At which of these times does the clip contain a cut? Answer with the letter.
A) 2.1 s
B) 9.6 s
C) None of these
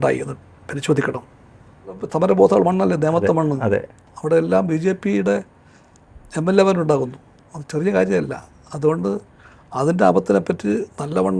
A